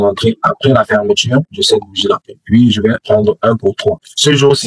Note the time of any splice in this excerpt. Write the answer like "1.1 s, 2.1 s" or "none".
none